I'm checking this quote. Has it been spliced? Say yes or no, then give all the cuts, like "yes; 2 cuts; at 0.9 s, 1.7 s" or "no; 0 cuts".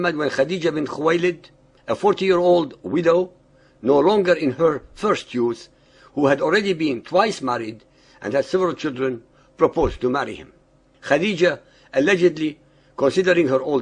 no; 0 cuts